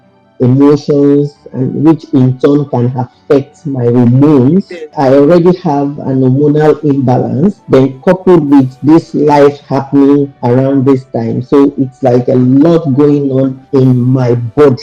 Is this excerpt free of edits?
no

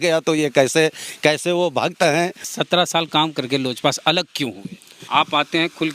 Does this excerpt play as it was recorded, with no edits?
no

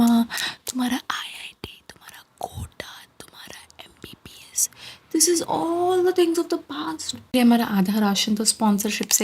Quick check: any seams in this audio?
yes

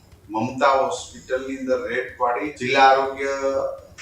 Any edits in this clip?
yes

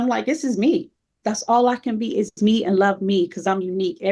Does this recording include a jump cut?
no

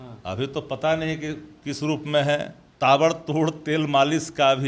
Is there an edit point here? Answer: yes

